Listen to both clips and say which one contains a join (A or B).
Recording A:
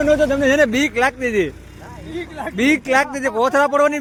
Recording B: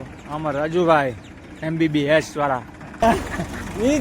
B